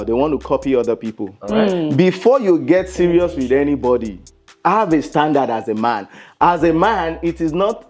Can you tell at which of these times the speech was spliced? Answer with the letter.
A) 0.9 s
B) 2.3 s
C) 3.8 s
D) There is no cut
D